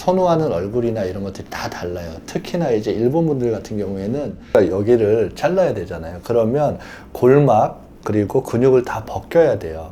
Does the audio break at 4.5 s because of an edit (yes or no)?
yes